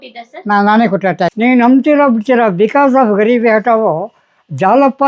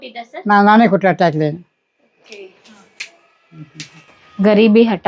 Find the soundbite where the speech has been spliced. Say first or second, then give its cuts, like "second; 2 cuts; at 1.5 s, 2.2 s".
first; 1 cut; at 1.3 s